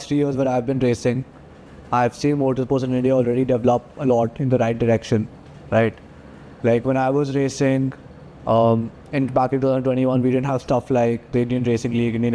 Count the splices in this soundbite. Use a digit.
0